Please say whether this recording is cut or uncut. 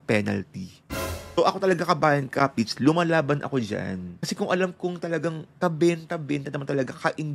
cut